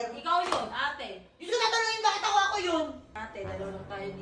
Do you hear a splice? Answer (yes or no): yes